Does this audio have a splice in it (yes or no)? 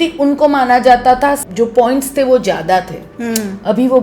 yes